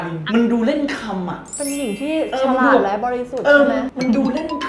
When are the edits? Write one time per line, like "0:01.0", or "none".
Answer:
none